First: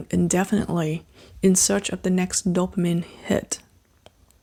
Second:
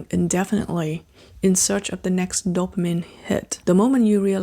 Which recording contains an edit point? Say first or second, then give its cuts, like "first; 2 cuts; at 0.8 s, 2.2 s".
second; 1 cut; at 3.5 s